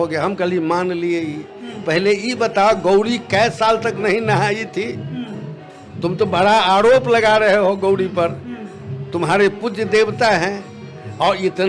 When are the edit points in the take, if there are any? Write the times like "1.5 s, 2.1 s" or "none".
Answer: none